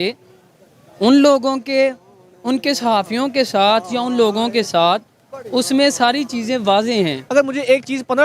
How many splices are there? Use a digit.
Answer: 1